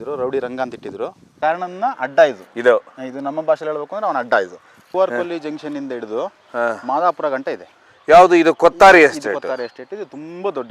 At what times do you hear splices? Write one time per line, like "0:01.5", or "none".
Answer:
0:01.3
0:02.5
0:04.8